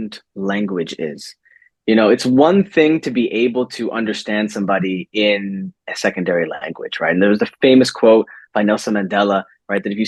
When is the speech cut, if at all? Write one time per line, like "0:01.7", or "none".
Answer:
none